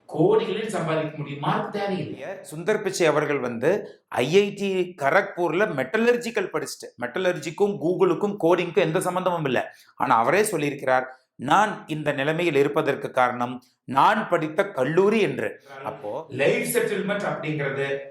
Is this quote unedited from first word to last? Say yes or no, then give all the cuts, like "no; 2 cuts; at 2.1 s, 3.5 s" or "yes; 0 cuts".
no; 2 cuts; at 2.5 s, 16.0 s